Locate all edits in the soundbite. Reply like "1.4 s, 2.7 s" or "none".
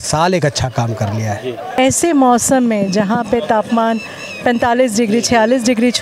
1.8 s